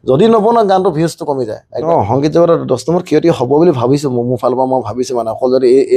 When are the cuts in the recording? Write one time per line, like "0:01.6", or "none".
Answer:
0:01.7